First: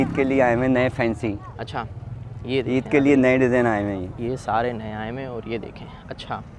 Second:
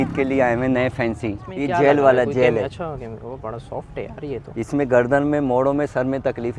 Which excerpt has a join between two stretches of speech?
second; 1 cut; at 1.5 s

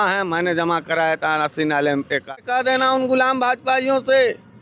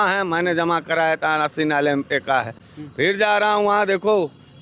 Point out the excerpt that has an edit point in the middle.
first; 1 cut; at 2.4 s

